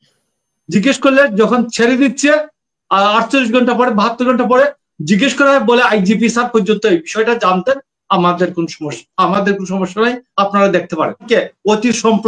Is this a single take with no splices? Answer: no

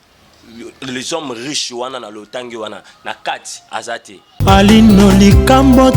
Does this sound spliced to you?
yes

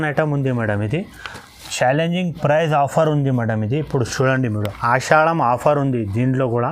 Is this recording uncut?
yes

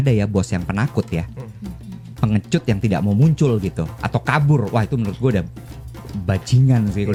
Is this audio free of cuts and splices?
yes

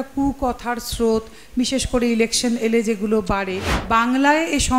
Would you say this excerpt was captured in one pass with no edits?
no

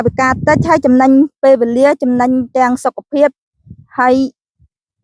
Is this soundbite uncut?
yes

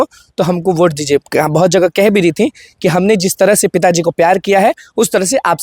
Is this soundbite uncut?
yes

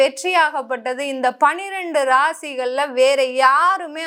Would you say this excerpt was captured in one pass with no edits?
yes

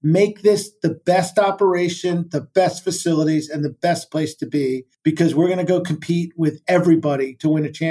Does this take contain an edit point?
yes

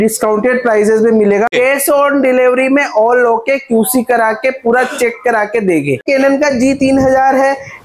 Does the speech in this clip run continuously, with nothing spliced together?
no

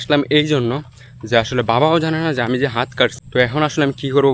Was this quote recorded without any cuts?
yes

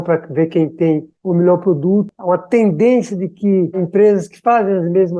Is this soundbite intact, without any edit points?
no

